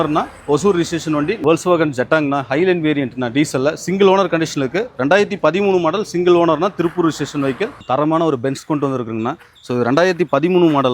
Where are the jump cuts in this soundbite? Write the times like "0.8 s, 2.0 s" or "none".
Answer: 1.4 s, 7.8 s